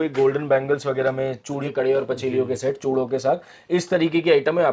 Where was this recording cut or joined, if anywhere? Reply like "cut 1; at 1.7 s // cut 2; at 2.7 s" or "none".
cut 1; at 1.6 s